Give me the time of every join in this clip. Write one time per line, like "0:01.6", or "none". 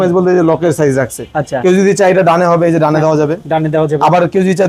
none